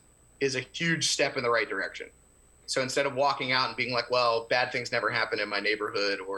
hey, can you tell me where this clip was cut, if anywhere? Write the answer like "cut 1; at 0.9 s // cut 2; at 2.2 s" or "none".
cut 1; at 2.6 s